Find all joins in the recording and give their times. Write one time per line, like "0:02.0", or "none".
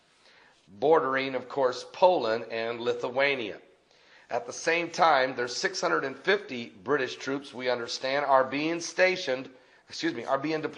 0:06.7